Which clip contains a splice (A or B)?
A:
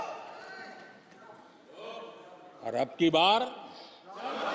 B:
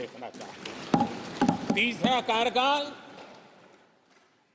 B